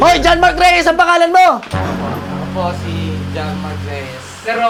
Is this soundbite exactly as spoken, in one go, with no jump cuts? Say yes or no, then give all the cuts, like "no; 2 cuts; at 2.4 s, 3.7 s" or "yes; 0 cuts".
yes; 0 cuts